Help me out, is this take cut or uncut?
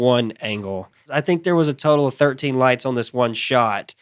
cut